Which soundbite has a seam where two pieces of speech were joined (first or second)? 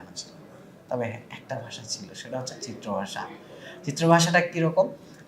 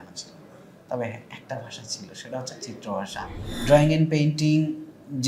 second